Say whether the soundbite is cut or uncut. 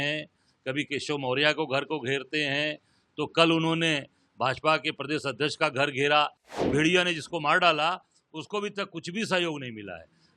cut